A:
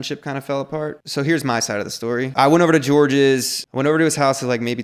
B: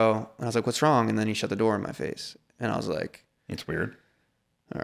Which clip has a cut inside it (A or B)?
A